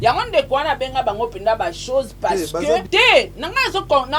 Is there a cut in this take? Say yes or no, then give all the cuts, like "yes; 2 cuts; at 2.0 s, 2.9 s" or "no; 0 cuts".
yes; 1 cut; at 2.9 s